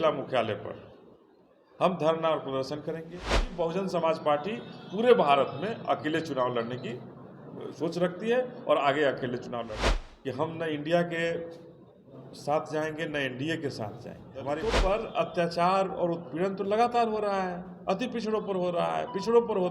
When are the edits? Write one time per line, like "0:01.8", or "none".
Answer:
0:03.5
0:09.7
0:14.7